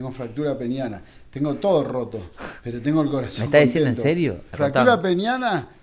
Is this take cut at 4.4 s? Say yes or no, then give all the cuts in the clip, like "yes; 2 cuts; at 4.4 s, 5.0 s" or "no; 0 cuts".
yes; 1 cut; at 4.4 s